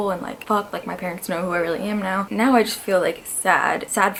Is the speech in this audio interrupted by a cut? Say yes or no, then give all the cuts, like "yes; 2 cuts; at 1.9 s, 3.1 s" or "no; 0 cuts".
no; 0 cuts